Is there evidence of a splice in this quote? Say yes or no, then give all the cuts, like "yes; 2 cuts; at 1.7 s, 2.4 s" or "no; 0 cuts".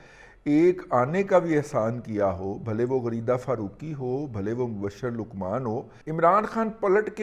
yes; 1 cut; at 5.9 s